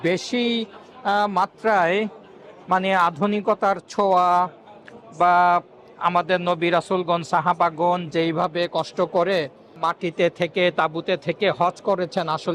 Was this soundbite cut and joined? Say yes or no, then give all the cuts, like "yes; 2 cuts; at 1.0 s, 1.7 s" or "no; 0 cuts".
no; 0 cuts